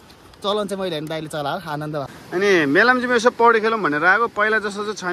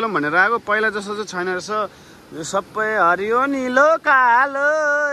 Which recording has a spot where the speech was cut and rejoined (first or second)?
first